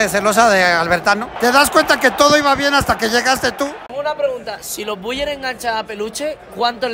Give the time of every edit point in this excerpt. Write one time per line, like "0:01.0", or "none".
0:01.3
0:04.0